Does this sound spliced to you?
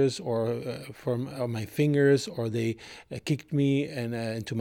no; 0 cuts

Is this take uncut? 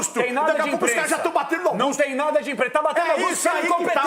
yes; 0 cuts

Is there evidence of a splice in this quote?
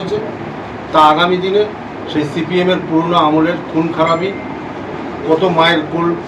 no; 0 cuts

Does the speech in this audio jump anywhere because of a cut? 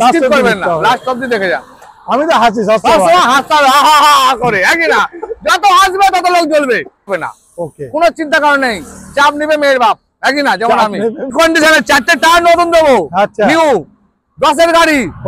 yes; 3 cuts; at 1.8 s, 7.1 s, 11.3 s

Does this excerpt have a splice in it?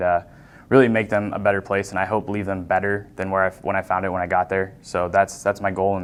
no; 0 cuts

